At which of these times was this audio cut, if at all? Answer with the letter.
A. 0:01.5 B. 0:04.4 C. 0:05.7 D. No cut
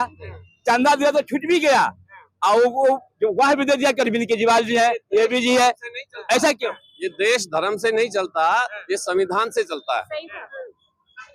D